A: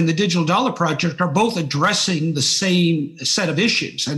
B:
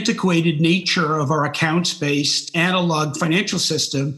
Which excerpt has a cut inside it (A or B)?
B